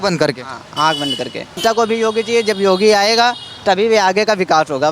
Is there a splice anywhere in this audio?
yes; 1 cut; at 1.6 s

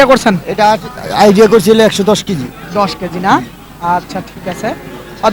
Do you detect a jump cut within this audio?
no; 0 cuts

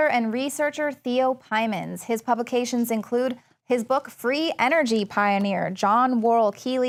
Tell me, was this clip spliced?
no; 0 cuts

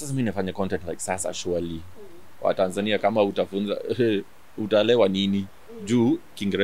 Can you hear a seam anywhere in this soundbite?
no; 0 cuts

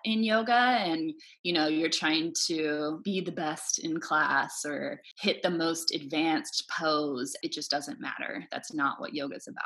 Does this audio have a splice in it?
yes; 3 cuts; at 3.0 s, 5.1 s, 7.3 s

